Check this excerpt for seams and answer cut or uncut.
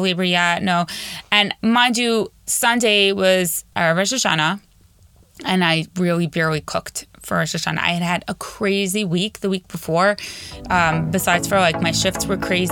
cut